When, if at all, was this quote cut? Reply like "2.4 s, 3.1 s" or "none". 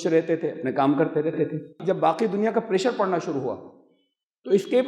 1.7 s